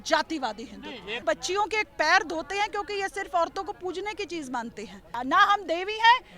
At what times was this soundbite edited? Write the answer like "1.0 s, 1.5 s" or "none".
1.2 s, 5.1 s